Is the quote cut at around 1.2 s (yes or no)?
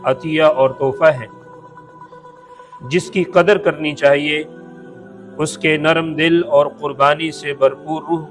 yes